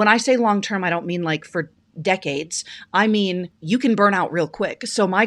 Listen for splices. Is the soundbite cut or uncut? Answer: cut